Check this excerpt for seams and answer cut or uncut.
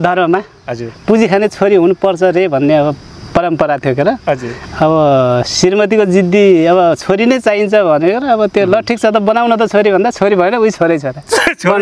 uncut